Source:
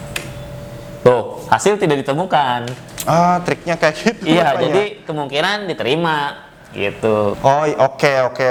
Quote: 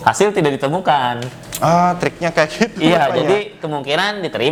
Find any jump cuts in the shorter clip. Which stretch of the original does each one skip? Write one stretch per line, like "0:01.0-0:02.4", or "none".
none